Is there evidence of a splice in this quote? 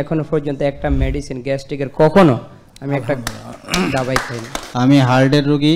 yes; 1 cut; at 4.6 s

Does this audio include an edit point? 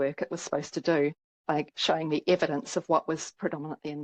no; 0 cuts

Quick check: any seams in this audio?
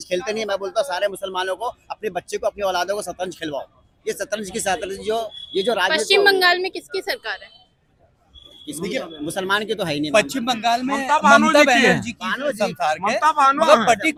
no; 0 cuts

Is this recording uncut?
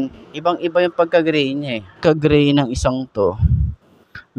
no; 1 cut; at 2.0 s

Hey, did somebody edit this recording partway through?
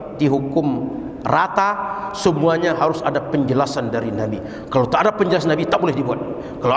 no; 0 cuts

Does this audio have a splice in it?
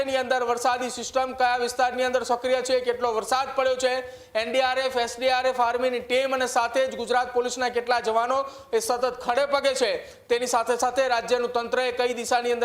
no; 0 cuts

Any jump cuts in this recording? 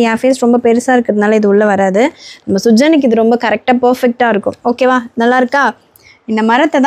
no; 0 cuts

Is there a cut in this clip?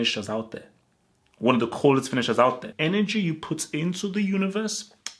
yes; 1 cut; at 2.7 s

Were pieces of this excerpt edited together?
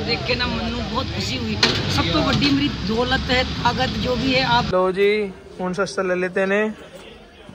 yes; 1 cut; at 4.7 s

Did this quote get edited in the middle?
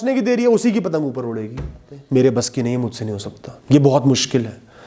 yes; 1 cut; at 1.9 s

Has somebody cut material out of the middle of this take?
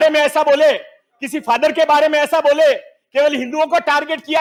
no; 0 cuts

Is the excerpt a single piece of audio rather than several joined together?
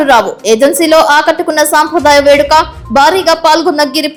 yes; 0 cuts

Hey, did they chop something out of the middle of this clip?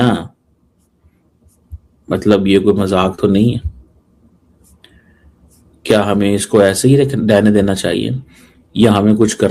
no; 0 cuts

